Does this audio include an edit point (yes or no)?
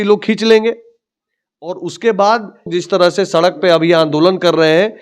yes